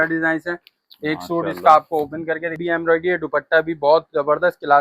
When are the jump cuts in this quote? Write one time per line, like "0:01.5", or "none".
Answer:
0:02.5

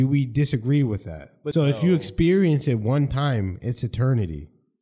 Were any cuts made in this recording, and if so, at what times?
0:01.4

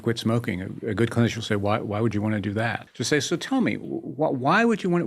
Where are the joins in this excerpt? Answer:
0:02.9

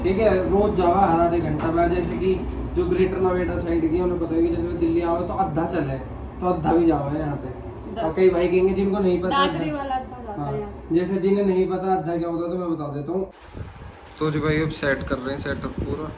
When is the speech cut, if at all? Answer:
0:13.3

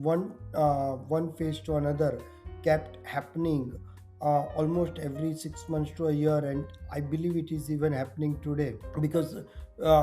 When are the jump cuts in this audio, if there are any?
0:08.8

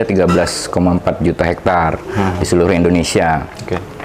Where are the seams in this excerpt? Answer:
none

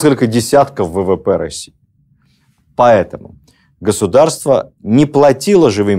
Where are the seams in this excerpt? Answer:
none

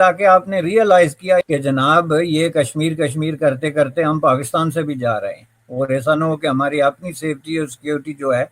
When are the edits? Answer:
0:01.5

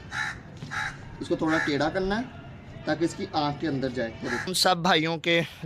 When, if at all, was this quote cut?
0:04.5

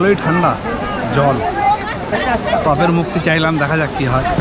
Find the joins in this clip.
none

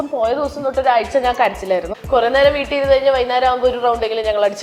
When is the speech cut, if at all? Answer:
0:01.9

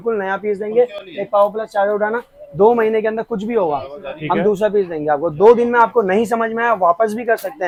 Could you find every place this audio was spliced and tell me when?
none

